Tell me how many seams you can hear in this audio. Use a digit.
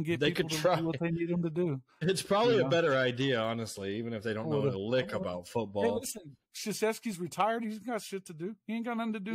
0